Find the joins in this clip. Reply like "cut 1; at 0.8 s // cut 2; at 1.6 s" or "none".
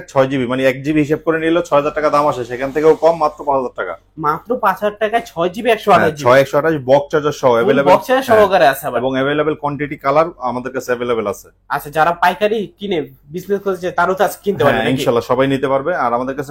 none

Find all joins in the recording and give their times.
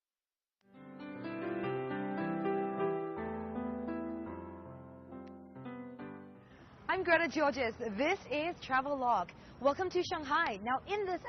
cut 1; at 3.5 s

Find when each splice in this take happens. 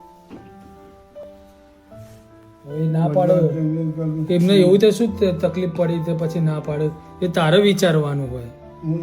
none

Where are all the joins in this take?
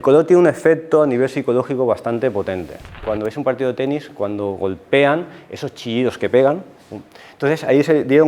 cut 1; at 3.0 s

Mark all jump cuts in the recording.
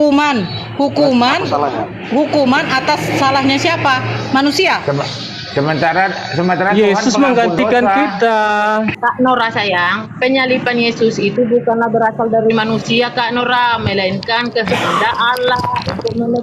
cut 1; at 8.9 s

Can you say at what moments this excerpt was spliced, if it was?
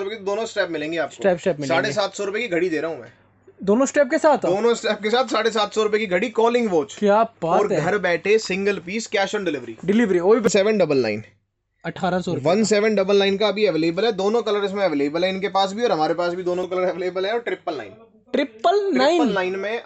cut 1; at 10.5 s // cut 2; at 16.7 s

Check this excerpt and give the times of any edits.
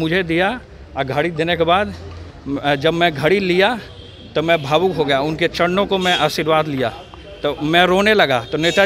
none

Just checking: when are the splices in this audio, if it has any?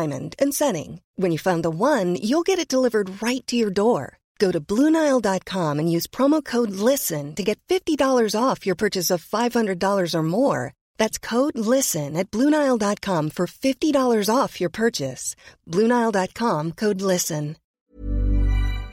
cut 1; at 17.9 s

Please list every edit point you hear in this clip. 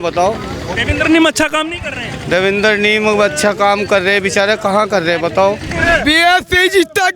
cut 1; at 5.7 s

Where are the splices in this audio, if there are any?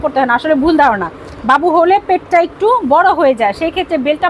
none

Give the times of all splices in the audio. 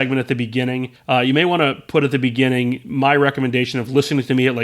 cut 1; at 0.9 s

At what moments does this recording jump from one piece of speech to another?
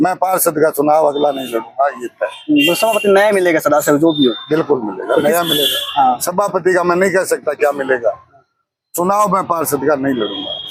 none

